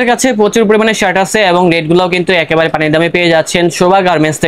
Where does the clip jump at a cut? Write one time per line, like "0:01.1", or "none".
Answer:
none

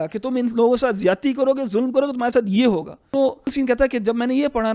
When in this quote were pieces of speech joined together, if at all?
0:03.5

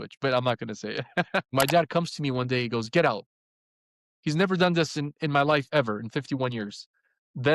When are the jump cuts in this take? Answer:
0:01.5

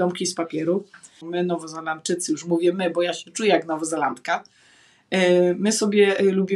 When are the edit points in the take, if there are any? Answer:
0:01.2

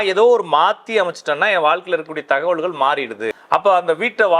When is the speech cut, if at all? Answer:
0:03.3

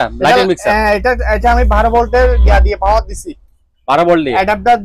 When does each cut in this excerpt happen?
none

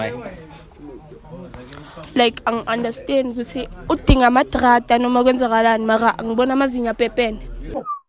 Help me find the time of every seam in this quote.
none

